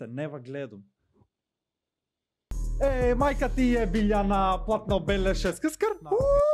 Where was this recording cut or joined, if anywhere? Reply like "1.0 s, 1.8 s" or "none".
2.6 s